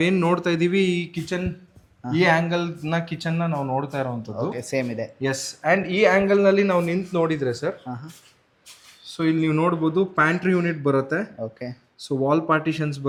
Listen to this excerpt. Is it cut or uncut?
uncut